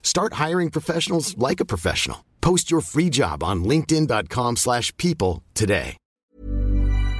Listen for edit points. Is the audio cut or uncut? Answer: cut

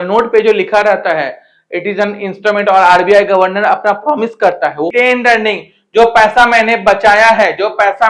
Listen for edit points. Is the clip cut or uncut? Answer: cut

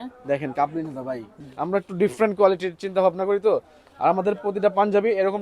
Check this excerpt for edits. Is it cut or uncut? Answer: cut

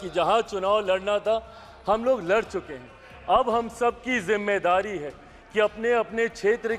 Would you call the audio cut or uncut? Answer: uncut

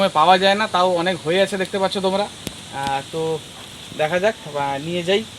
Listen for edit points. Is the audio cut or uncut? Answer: uncut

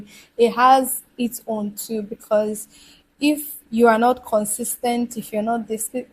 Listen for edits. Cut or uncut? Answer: uncut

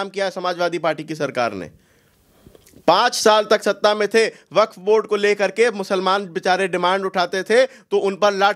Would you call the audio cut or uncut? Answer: uncut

